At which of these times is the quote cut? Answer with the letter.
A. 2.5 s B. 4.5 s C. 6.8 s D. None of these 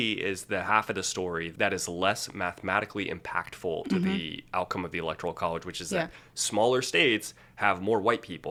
D